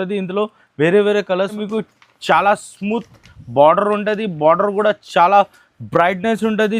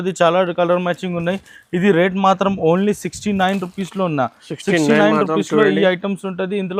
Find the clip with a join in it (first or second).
first